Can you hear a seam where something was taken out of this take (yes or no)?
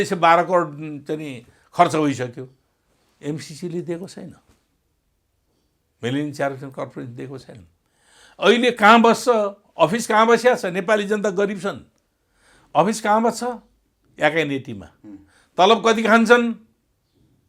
no